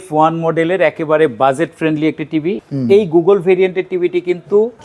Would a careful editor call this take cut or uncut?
cut